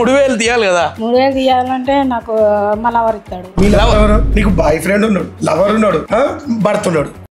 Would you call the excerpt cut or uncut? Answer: cut